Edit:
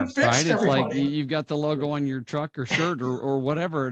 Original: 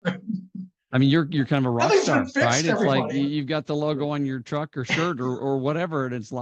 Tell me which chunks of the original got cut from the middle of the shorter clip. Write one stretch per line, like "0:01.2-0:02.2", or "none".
none